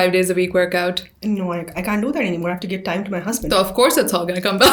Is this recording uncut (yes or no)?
yes